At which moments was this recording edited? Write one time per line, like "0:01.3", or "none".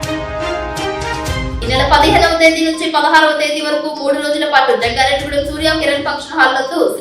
none